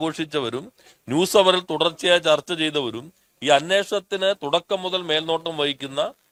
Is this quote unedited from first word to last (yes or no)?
yes